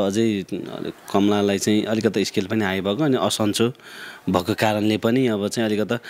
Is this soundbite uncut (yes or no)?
yes